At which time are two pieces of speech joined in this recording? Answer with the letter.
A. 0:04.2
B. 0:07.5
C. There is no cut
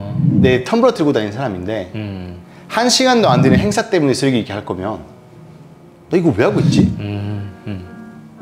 C